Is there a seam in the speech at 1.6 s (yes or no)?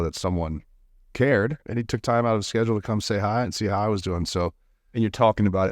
yes